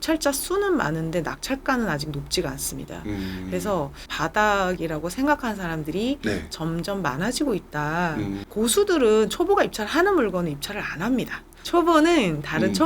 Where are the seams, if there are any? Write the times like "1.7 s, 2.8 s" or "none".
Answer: 4.1 s, 8.4 s, 11.6 s